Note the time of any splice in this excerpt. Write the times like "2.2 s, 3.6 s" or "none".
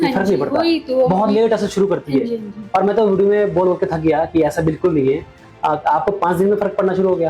none